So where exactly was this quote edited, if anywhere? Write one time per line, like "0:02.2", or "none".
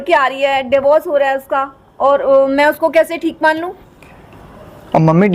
none